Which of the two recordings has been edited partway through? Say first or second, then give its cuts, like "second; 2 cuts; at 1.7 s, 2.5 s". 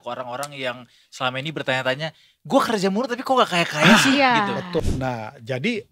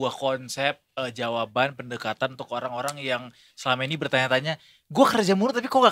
first; 1 cut; at 4.8 s